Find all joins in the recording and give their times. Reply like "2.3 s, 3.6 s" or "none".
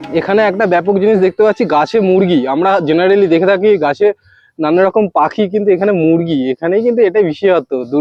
none